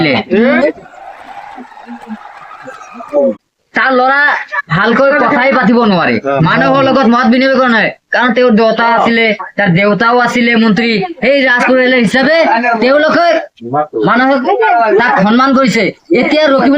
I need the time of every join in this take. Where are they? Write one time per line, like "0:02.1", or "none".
0:03.5

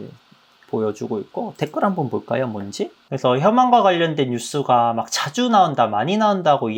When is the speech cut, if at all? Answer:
0:03.0

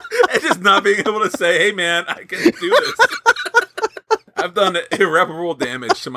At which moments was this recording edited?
0:04.5

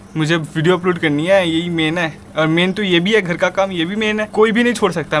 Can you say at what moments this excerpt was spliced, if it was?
0:04.3

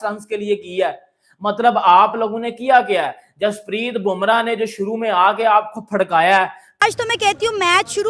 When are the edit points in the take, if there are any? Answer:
0:06.8

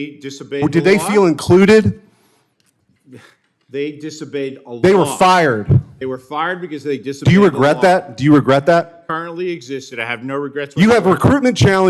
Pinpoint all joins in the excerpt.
none

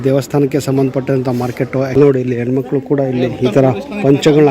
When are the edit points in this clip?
0:01.9

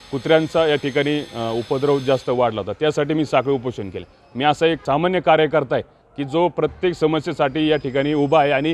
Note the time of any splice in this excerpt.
0:04.8

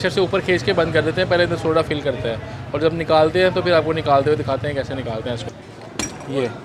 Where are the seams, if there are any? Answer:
0:05.4

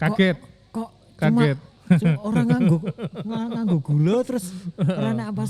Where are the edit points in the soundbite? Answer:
none

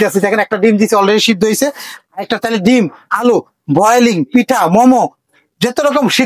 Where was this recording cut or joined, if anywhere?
none

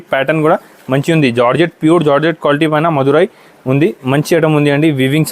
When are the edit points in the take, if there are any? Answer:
none

